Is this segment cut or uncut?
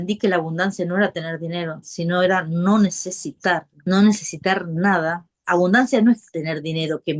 cut